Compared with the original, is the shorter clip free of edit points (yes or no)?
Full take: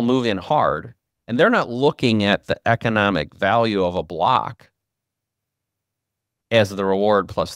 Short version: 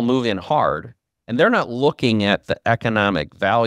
yes